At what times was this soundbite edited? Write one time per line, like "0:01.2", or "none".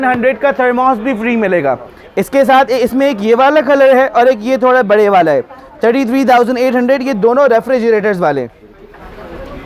none